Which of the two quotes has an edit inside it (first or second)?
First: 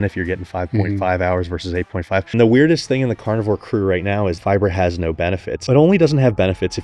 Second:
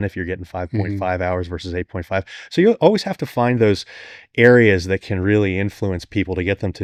first